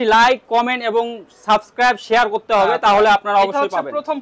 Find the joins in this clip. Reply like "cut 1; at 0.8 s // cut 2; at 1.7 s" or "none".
none